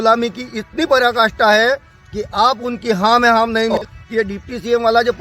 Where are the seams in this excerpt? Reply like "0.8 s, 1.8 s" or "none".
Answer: 3.8 s